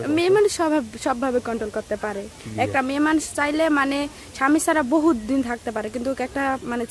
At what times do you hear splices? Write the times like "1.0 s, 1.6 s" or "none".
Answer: none